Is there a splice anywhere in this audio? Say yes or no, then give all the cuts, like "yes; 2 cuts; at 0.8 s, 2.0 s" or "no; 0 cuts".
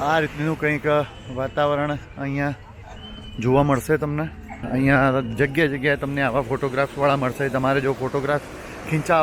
yes; 1 cut; at 4.6 s